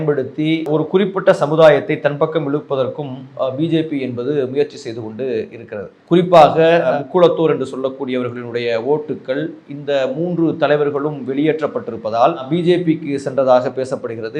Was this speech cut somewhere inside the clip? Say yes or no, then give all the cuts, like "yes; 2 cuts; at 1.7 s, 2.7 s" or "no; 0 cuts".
no; 0 cuts